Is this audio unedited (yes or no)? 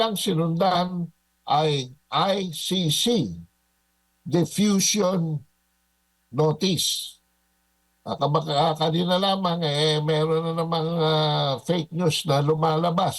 yes